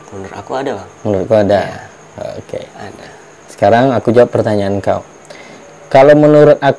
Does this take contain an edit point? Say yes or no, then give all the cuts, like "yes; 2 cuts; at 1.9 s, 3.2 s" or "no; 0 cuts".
no; 0 cuts